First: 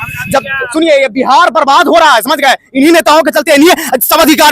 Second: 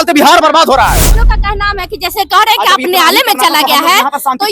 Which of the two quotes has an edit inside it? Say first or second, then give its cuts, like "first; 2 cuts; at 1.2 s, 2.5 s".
second; 1 cut; at 1.2 s